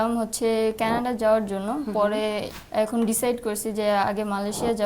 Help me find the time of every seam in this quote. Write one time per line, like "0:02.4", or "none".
0:02.5